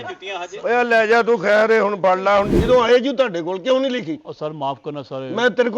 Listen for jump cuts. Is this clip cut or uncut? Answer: cut